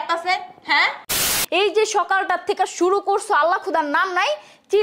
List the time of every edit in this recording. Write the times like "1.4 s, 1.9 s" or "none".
1.3 s